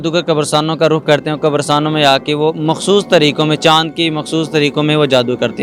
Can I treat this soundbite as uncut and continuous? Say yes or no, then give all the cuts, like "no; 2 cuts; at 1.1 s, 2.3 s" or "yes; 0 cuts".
yes; 0 cuts